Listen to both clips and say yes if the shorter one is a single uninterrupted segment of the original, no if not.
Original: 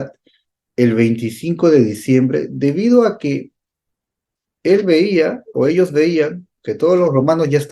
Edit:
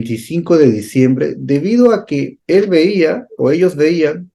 no